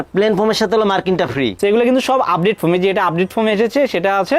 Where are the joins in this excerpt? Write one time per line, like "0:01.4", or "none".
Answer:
0:01.5